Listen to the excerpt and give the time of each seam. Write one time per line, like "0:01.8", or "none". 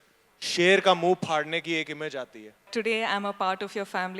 0:02.7